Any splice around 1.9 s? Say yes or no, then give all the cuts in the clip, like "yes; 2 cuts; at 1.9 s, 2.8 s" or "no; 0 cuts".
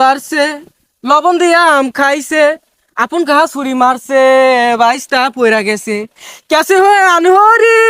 no; 0 cuts